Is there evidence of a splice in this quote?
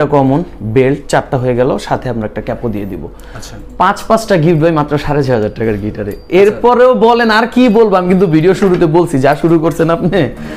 no; 0 cuts

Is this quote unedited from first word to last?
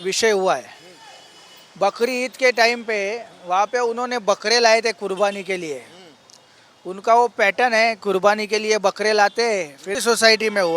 no; 1 cut; at 9.9 s

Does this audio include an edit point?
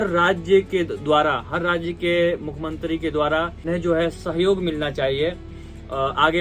yes; 1 cut; at 3.6 s

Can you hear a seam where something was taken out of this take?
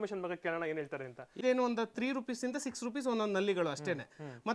yes; 1 cut; at 1.3 s

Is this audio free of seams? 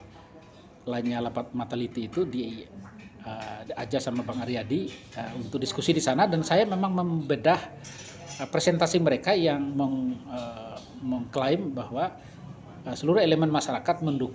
yes; 0 cuts

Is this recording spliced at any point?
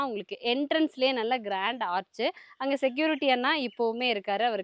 no; 0 cuts

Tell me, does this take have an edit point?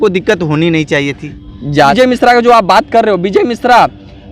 yes; 1 cut; at 1.9 s

